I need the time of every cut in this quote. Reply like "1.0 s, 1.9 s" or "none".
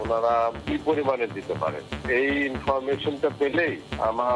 none